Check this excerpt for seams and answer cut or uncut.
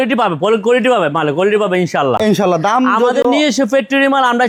uncut